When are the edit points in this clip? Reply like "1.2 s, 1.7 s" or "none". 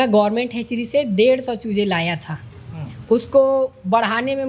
none